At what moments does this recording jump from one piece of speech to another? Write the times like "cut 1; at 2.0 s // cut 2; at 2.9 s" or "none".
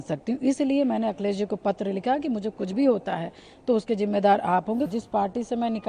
cut 1; at 4.9 s